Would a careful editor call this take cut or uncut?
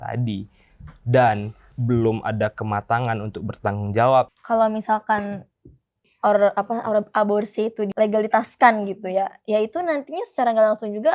cut